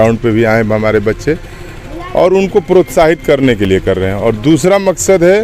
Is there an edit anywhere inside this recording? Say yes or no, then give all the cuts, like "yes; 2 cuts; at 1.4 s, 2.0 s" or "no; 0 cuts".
no; 0 cuts